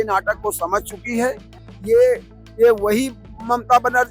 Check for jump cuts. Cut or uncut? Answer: uncut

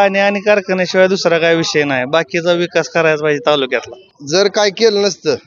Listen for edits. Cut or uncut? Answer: cut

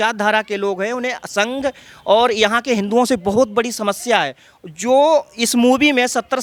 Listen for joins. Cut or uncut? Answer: uncut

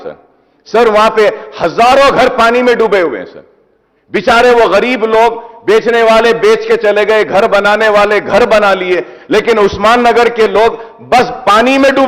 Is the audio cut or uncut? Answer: uncut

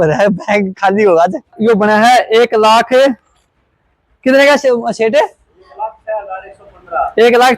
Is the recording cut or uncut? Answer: cut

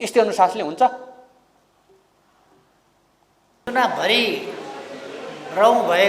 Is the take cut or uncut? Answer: cut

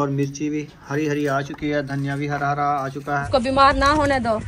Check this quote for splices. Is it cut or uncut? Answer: cut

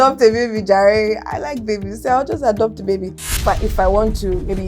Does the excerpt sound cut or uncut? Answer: cut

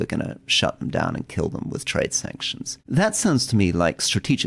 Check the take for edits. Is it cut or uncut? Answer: cut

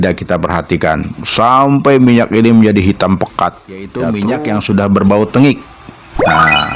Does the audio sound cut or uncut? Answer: cut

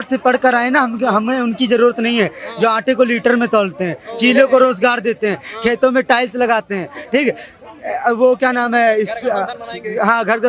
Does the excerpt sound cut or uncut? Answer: uncut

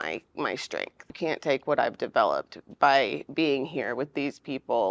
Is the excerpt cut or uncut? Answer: cut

